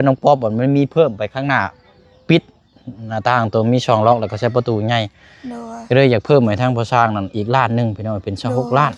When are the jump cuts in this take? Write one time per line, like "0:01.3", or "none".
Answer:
none